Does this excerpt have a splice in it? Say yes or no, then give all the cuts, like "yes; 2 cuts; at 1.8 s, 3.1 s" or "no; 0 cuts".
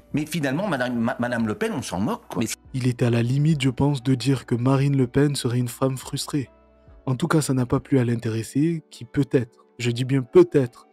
no; 0 cuts